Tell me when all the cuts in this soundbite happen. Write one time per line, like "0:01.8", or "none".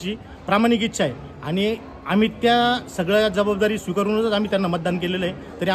none